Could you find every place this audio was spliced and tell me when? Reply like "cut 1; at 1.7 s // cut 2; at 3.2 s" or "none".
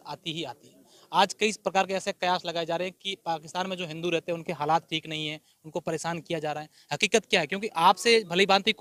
none